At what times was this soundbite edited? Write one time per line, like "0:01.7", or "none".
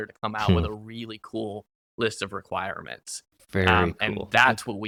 none